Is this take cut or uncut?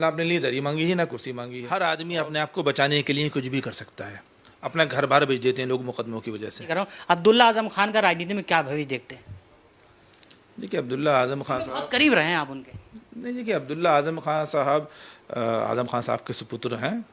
cut